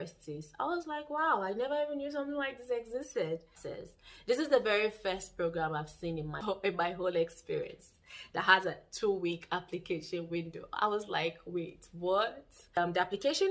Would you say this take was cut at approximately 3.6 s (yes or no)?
yes